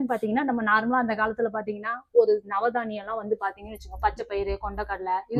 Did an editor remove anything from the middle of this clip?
no; 0 cuts

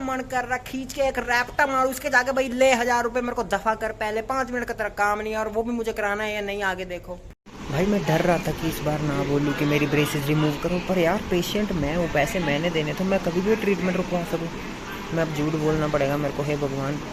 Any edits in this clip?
no; 0 cuts

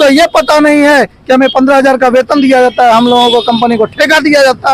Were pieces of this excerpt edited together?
no; 0 cuts

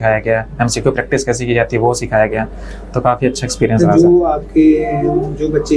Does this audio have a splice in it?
no; 0 cuts

